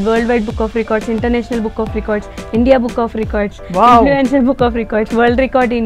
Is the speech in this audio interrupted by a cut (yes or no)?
no